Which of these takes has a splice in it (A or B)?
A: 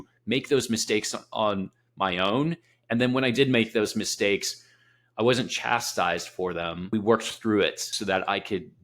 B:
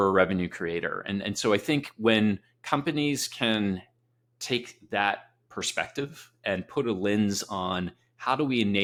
A